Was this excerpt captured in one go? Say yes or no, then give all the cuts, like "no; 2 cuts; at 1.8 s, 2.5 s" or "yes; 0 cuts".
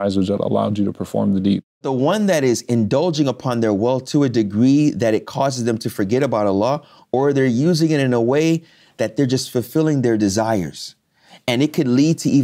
no; 1 cut; at 1.7 s